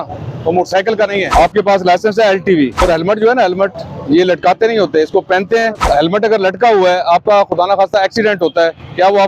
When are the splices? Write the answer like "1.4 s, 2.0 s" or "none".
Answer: 1.3 s, 2.8 s, 5.8 s